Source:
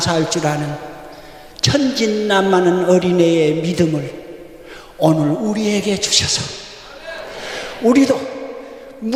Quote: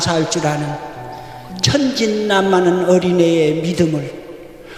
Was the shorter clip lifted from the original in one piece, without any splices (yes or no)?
yes